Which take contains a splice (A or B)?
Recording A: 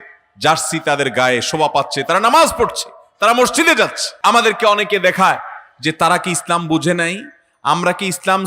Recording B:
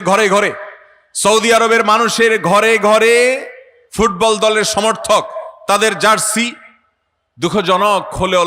A